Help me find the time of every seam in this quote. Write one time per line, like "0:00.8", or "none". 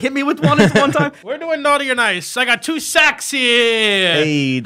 0:01.2